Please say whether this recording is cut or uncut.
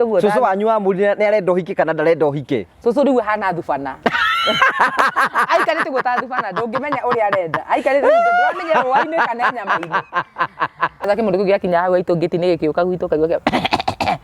cut